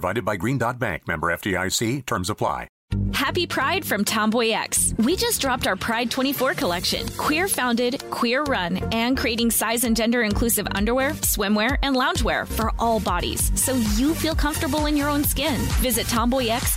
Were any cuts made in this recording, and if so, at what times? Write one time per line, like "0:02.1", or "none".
0:02.8

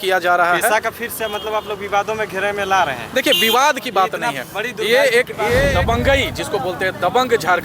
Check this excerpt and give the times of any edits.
0:05.8

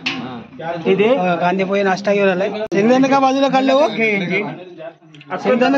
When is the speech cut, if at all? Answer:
0:02.7

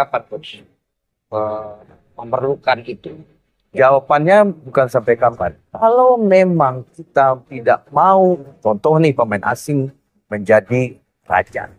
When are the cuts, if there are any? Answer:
none

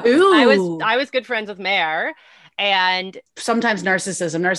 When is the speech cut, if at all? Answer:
0:03.3

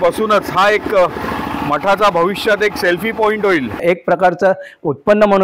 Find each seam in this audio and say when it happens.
0:03.8

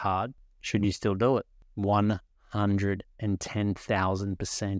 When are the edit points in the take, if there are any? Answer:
none

